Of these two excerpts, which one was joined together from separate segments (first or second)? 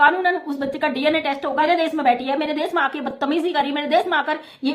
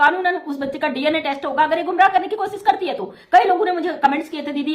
first